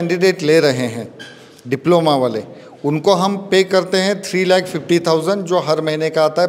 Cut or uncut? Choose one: uncut